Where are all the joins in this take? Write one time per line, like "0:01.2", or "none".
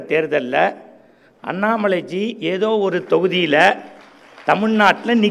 none